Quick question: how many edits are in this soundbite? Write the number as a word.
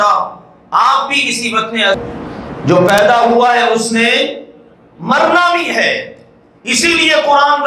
one